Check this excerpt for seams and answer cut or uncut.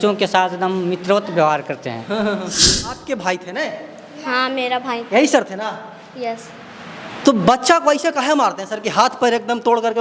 cut